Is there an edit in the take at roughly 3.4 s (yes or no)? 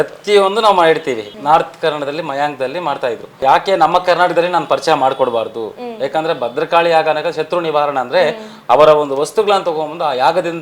yes